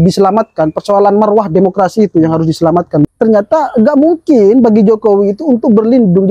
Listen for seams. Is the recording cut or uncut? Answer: cut